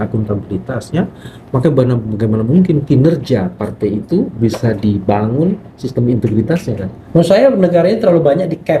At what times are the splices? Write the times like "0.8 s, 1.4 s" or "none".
6.9 s